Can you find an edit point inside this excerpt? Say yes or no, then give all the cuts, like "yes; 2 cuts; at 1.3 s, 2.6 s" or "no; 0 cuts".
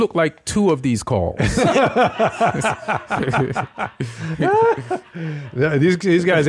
no; 0 cuts